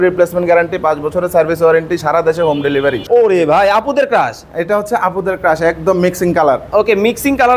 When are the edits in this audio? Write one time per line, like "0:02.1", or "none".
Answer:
0:03.0